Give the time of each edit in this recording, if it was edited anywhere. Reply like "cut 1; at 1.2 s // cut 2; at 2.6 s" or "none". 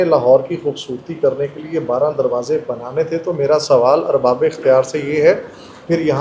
none